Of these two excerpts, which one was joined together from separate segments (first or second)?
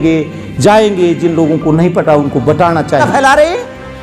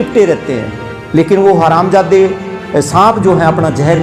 first